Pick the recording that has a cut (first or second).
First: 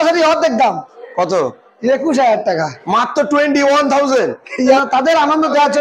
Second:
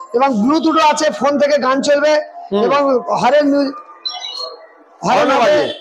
first